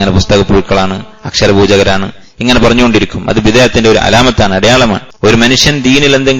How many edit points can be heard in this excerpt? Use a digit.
1